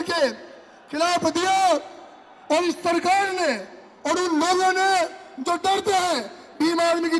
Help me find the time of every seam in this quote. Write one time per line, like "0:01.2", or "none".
none